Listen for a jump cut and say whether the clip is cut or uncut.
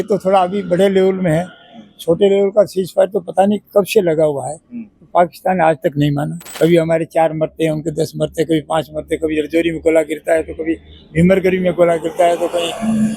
cut